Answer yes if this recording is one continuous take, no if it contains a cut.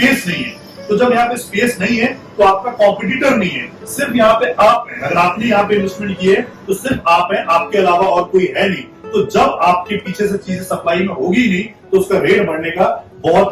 yes